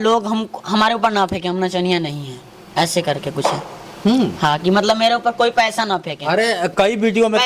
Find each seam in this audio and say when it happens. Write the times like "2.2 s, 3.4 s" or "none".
none